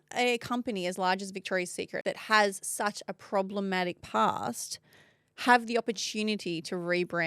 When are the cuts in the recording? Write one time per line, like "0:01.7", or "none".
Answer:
0:02.0